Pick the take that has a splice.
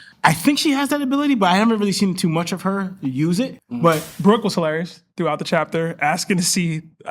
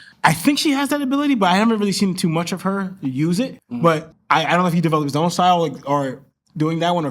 first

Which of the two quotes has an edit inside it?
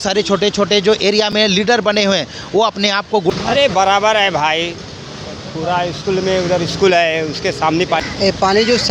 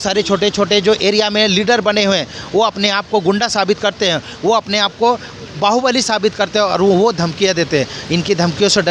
first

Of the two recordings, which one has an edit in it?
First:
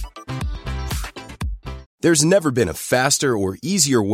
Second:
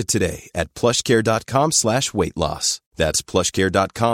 first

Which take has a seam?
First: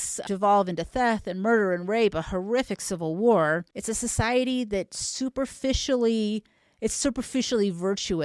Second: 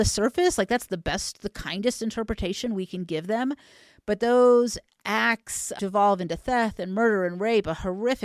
first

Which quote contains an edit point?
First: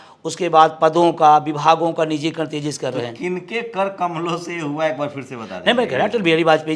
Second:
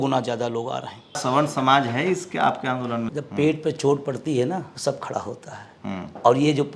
second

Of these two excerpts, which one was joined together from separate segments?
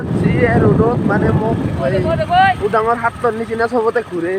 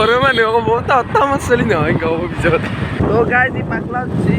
second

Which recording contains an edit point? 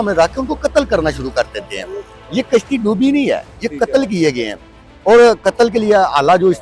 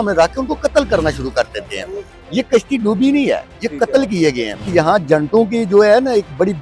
second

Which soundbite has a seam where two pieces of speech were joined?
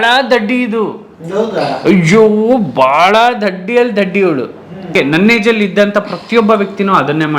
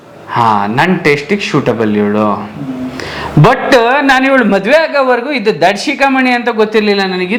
first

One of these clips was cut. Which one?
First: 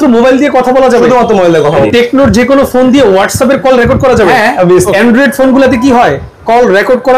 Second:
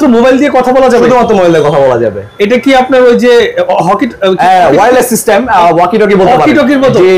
first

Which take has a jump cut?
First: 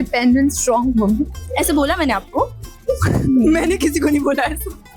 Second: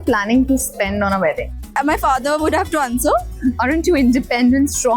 second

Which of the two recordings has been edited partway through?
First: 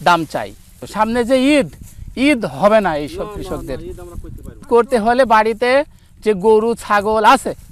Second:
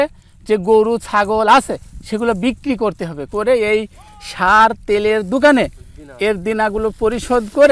first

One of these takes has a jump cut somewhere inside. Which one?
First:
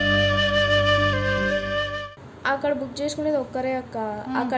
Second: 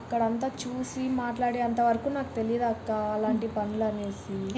first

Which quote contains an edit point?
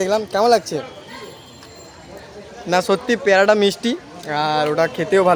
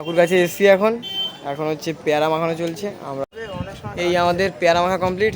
second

